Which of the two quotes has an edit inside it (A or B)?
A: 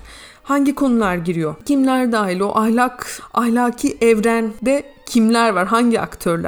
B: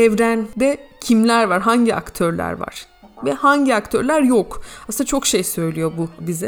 A